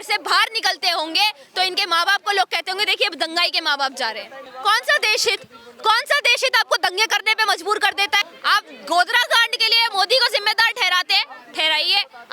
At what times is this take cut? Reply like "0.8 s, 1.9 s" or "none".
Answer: 4.5 s, 8.3 s